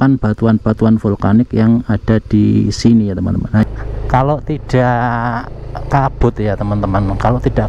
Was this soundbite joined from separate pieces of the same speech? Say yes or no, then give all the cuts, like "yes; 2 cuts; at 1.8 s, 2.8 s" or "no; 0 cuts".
yes; 1 cut; at 3.6 s